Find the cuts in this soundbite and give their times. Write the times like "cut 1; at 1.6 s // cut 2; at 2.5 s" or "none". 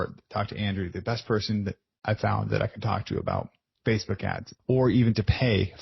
cut 1; at 3.6 s // cut 2; at 4.5 s